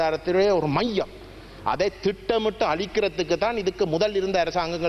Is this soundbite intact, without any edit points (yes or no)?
yes